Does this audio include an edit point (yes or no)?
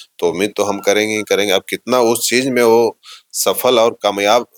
no